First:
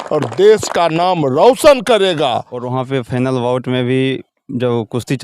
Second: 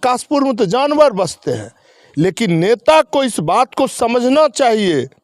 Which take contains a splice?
first; 1 cut; at 2.6 s

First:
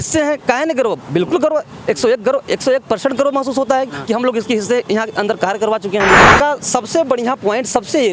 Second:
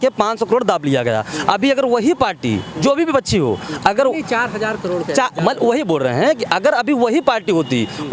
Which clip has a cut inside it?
first; 1 cut; at 6.2 s

